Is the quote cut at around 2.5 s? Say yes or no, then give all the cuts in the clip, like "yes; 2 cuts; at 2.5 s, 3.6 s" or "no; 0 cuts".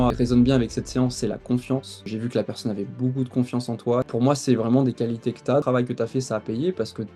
no; 2 cuts; at 4.1 s, 5.6 s